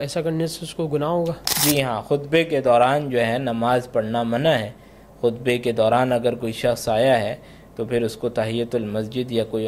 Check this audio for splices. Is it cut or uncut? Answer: cut